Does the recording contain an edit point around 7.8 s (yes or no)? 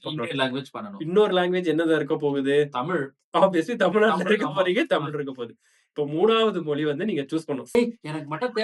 yes